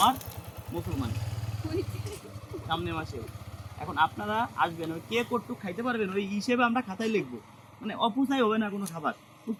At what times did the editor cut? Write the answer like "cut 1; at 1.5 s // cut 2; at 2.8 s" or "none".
none